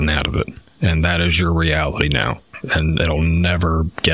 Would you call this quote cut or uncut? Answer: uncut